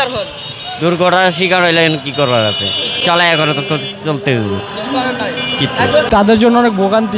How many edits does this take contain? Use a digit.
1